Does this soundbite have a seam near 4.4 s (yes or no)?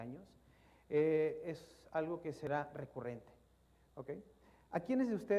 no